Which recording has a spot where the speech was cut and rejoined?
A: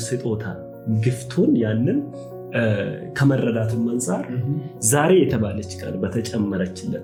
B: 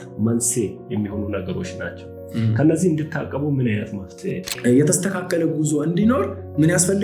B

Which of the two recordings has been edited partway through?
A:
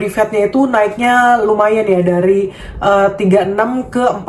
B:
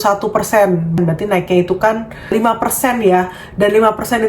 B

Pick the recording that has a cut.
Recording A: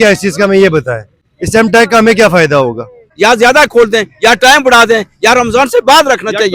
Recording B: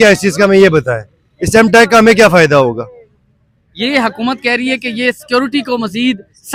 A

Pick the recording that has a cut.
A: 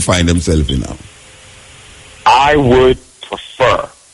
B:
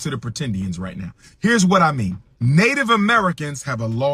B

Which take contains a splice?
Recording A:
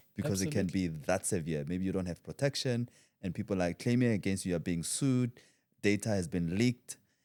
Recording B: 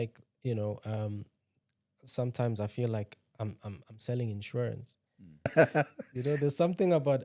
B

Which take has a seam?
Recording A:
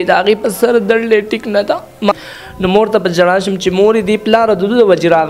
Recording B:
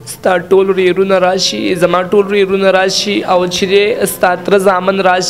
A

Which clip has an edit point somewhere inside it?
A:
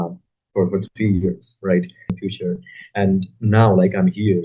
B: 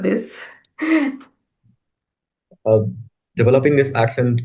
A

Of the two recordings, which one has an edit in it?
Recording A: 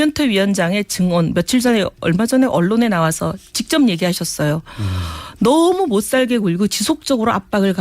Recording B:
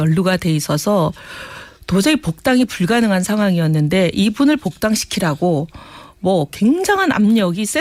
A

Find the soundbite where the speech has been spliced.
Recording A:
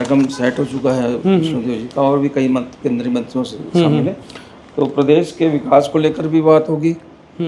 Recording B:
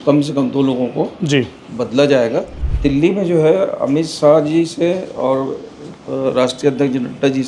B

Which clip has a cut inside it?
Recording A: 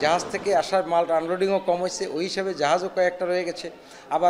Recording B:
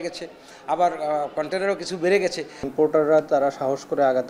B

